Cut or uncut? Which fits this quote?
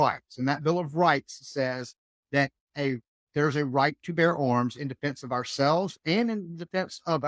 uncut